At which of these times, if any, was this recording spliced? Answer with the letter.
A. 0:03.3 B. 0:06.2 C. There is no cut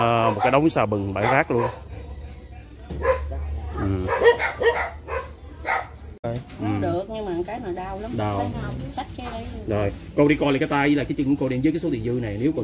B